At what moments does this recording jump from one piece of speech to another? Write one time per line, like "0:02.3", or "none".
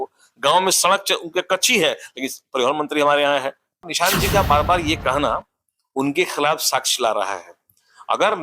0:03.9